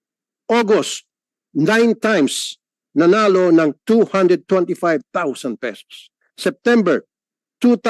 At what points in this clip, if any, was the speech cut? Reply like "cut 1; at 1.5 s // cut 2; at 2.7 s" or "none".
none